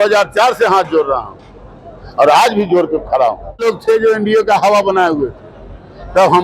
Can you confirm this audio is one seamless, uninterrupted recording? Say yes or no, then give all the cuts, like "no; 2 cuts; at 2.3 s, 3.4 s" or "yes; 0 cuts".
no; 1 cut; at 3.6 s